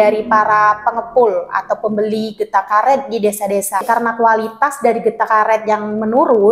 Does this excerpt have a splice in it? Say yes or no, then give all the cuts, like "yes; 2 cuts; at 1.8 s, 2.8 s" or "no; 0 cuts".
yes; 1 cut; at 3.8 s